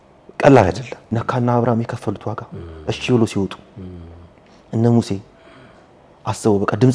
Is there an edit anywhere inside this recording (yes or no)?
yes